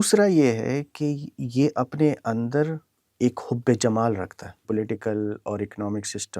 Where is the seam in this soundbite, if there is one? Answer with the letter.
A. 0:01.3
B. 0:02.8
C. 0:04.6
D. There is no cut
C